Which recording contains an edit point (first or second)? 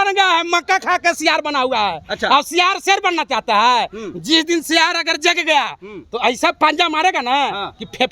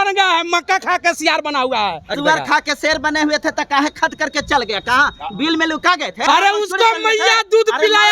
second